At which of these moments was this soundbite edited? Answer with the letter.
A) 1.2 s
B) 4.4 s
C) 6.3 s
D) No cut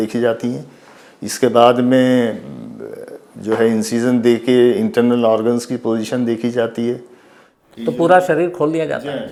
D